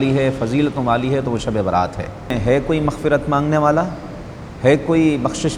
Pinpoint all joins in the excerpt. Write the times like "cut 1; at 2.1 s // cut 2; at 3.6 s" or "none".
cut 1; at 2.3 s